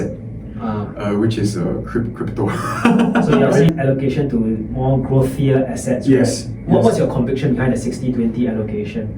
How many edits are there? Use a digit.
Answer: 1